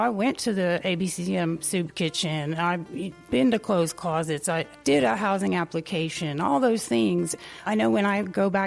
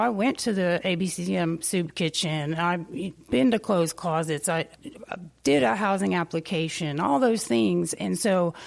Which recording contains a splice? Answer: first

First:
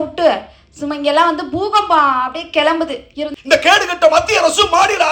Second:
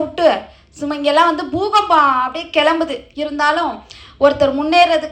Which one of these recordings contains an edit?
first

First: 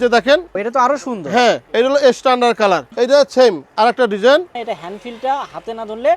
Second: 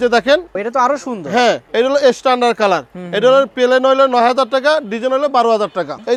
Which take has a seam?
first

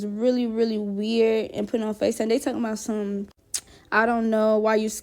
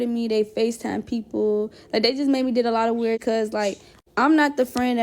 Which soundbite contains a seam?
second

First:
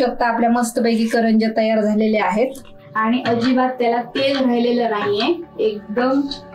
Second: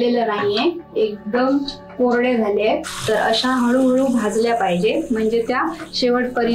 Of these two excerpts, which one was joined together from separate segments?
second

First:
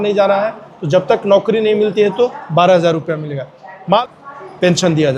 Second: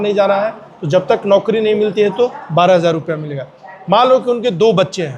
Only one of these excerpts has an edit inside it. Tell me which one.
first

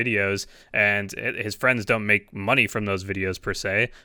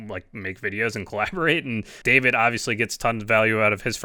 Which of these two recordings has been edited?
second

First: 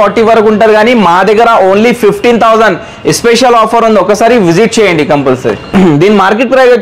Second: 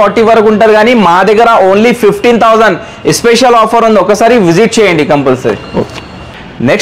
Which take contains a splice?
first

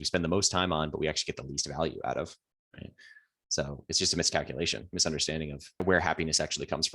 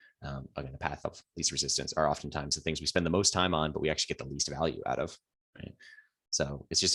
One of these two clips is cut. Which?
first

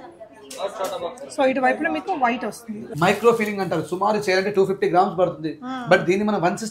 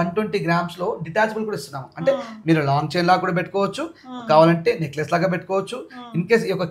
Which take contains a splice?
first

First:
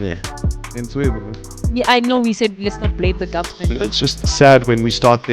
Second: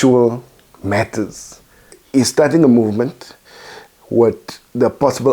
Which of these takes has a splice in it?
second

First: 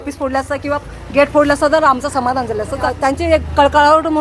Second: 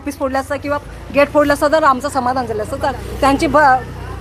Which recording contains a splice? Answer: first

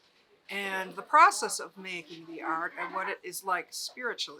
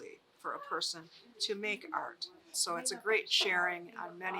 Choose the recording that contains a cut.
second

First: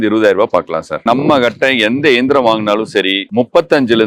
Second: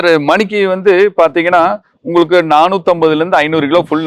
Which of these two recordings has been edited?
first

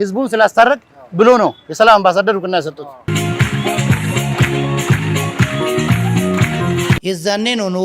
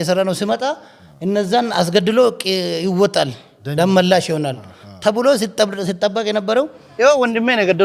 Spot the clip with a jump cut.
first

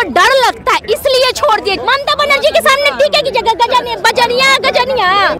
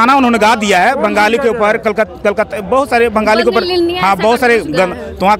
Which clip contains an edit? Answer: first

